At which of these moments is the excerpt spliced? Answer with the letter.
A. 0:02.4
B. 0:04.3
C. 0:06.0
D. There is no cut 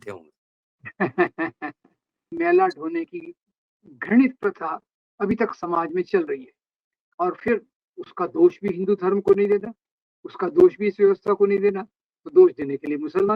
A